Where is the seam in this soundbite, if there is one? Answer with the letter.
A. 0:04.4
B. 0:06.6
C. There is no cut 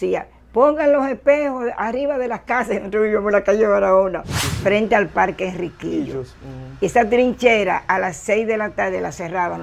A